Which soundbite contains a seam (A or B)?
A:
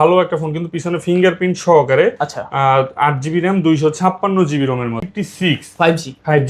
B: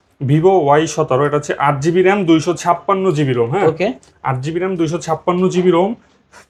A